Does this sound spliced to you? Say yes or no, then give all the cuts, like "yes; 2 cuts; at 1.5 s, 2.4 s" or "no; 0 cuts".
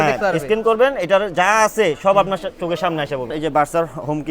yes; 1 cut; at 3.3 s